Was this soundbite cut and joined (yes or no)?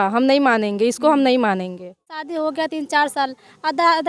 yes